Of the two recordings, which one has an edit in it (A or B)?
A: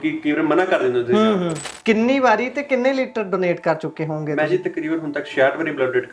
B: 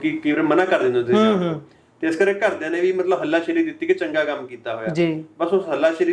A